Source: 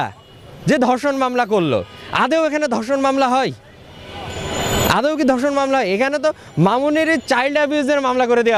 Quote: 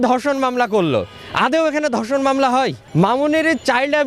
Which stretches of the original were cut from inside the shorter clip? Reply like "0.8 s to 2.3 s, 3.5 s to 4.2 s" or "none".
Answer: 3.6 s to 6.5 s